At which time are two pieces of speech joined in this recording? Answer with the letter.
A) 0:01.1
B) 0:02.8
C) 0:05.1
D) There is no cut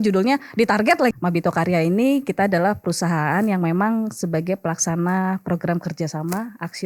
A